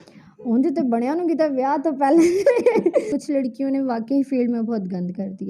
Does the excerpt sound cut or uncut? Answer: cut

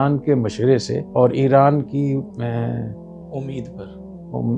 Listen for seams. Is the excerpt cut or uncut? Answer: cut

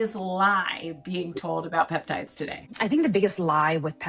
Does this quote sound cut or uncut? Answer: cut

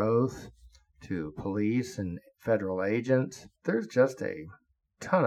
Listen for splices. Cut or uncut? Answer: cut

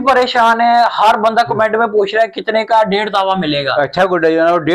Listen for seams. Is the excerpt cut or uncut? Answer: uncut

